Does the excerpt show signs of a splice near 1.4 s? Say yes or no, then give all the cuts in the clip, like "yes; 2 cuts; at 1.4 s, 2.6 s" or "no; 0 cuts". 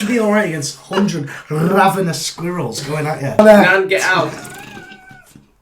no; 1 cut; at 3.4 s